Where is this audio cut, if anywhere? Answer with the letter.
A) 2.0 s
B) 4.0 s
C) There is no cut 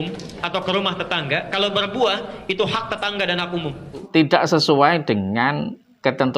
B